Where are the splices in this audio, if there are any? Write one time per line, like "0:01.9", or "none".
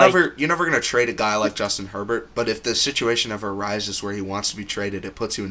none